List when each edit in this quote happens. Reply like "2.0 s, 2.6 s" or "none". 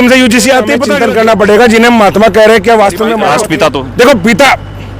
0.9 s, 3.2 s